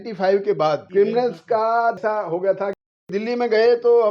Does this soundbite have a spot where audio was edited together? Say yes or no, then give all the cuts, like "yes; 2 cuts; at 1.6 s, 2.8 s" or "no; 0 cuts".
yes; 3 cuts; at 0.8 s, 2.0 s, 3.1 s